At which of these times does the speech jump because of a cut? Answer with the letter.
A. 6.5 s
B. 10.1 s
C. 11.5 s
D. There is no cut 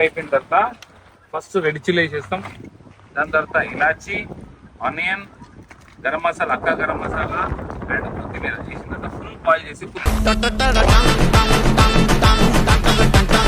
D